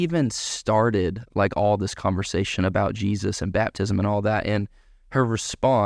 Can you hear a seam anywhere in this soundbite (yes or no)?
no